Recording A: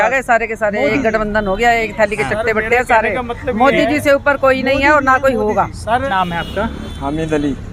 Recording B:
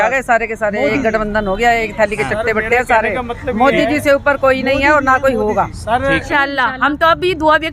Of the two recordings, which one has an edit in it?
B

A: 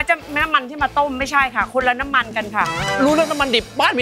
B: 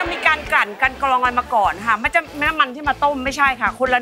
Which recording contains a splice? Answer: A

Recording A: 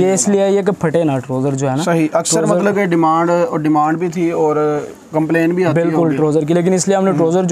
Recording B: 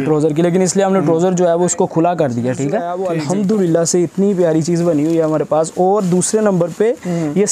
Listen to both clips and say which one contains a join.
B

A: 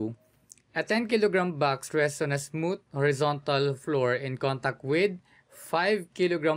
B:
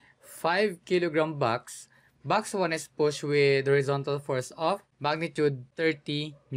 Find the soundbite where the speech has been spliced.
B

